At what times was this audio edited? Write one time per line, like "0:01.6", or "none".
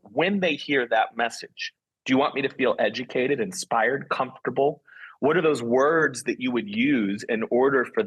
none